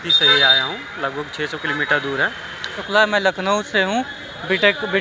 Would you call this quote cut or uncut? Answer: cut